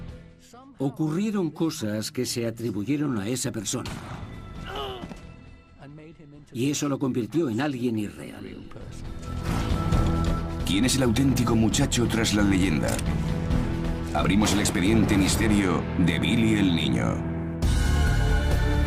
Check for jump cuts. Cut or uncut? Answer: uncut